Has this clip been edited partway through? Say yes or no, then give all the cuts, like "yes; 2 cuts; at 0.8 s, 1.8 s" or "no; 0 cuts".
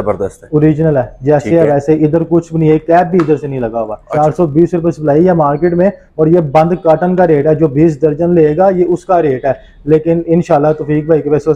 yes; 1 cut; at 4.0 s